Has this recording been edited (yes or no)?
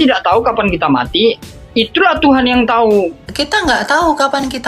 yes